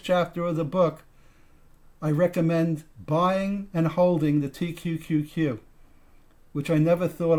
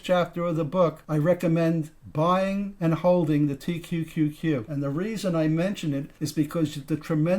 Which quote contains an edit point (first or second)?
second